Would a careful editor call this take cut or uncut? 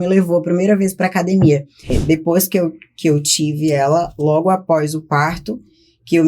cut